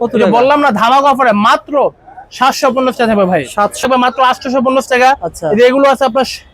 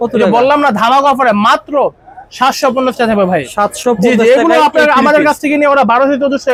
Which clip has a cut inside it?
first; 1 cut; at 3.8 s

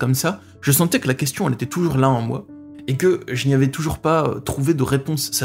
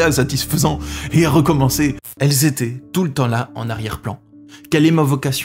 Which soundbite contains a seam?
second; 1 cut; at 2.0 s

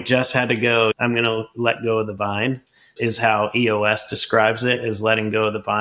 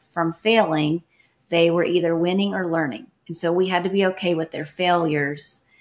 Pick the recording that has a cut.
first; 1 cut; at 1.0 s

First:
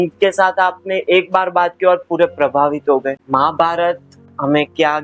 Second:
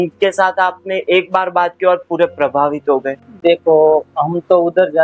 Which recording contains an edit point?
first; 1 cut; at 3.2 s

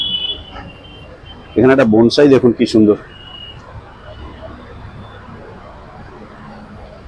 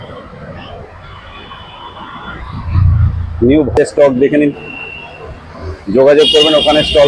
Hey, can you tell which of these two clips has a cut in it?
second; 1 cut; at 3.7 s

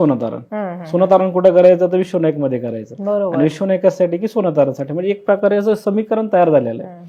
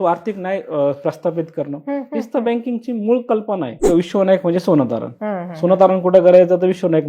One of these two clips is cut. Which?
second; 1 cut; at 3.8 s

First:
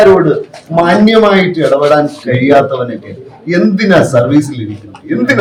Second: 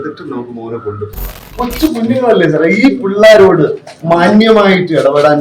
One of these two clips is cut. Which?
second; 1 cut; at 1.5 s

